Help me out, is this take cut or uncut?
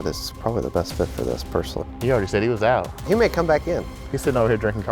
cut